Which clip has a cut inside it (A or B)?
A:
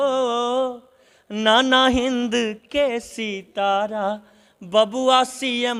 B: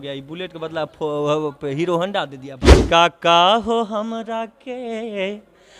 B